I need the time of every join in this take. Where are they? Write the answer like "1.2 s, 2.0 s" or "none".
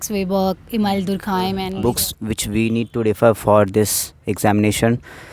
1.7 s

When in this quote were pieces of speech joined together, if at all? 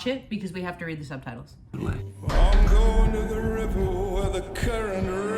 1.7 s

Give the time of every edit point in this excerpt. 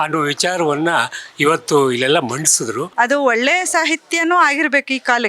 2.8 s

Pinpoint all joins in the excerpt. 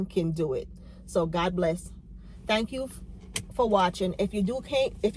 none

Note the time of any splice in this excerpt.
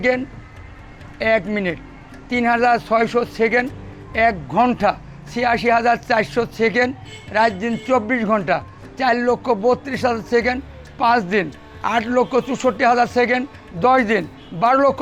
none

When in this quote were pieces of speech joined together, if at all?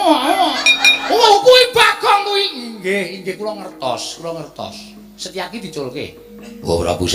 1.3 s

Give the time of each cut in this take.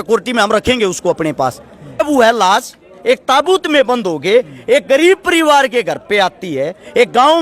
2.0 s

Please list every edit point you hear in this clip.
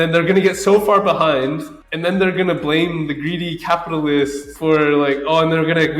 4.5 s

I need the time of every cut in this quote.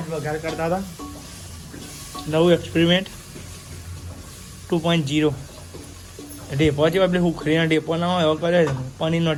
none

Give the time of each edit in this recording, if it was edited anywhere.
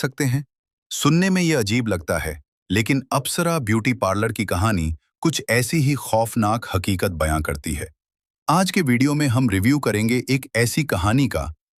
none

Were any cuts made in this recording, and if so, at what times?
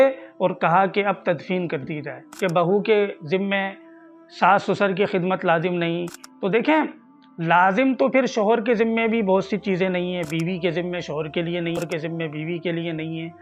2.3 s, 11.8 s

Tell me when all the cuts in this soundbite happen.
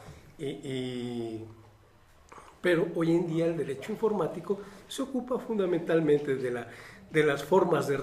3.5 s

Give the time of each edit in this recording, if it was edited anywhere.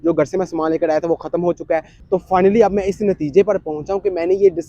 2.0 s

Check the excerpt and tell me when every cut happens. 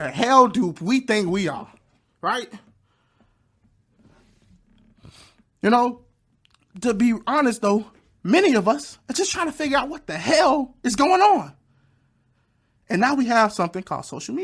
none

